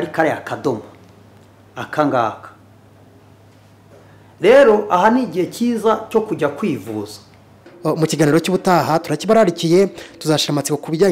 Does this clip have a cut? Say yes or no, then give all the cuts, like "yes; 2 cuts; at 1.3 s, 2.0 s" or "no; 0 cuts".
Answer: yes; 1 cut; at 7.7 s